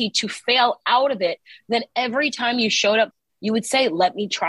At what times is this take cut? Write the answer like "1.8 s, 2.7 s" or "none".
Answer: 3.2 s